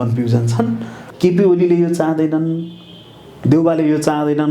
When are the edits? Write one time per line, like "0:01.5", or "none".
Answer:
0:01.0